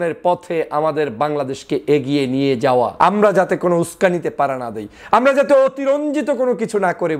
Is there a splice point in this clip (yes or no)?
yes